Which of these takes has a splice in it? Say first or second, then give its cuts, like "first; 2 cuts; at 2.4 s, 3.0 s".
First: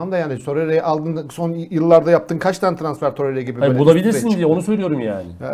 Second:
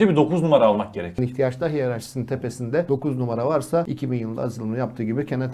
second; 3 cuts; at 1.2 s, 2.9 s, 3.9 s